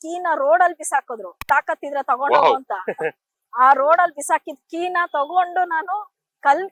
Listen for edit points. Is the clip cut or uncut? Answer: cut